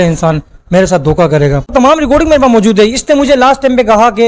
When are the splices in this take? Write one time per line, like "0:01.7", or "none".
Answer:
0:01.7